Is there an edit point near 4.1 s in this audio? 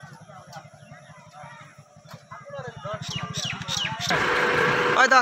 yes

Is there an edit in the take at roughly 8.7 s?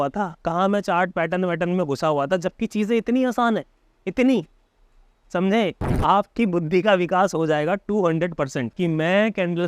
yes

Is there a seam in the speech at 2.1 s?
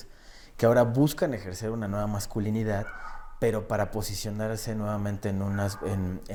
no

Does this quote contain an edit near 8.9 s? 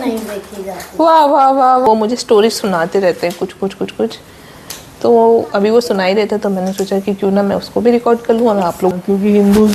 yes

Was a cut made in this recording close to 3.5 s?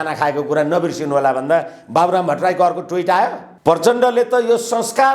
yes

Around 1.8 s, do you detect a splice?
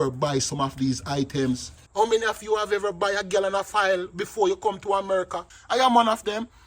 yes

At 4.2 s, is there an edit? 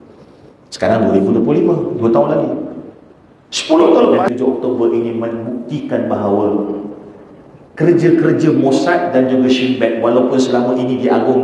yes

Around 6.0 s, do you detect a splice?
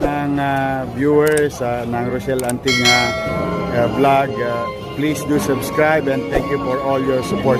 no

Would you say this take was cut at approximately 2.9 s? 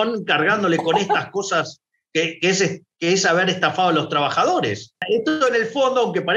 no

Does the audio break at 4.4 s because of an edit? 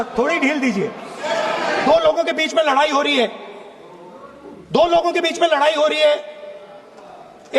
no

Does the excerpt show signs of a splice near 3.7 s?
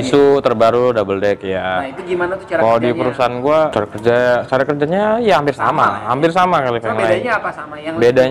yes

